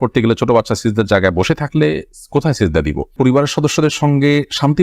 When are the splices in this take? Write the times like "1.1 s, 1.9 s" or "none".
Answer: 3.1 s